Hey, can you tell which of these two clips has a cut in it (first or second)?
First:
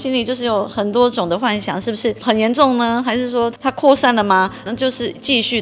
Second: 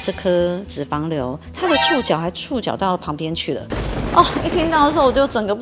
first